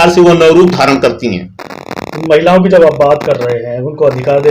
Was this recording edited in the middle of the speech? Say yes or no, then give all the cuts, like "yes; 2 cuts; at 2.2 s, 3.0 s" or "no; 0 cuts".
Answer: no; 0 cuts